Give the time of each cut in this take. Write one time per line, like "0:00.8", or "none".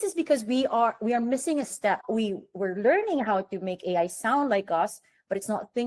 0:02.0